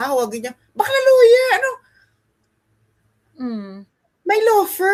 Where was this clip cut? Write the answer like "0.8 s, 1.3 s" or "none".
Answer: none